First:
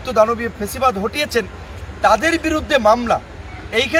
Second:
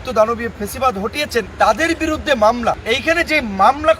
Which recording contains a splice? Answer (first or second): second